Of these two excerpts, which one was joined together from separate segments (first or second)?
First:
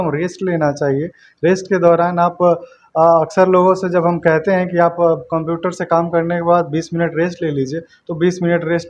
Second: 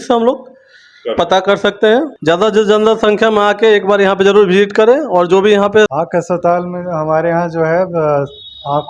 second